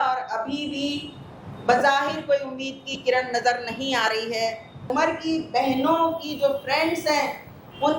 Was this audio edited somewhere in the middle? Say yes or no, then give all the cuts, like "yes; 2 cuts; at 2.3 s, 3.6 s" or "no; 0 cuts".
yes; 1 cut; at 4.9 s